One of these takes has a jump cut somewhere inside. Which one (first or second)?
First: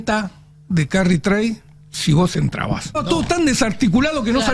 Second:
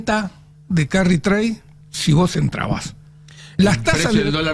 first